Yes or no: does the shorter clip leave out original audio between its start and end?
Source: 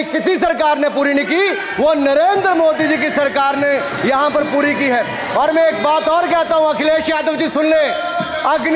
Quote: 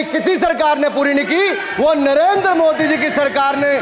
no